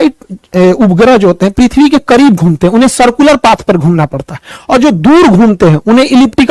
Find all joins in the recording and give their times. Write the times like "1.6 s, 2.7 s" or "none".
none